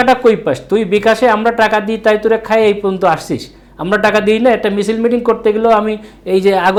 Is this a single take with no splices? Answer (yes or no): yes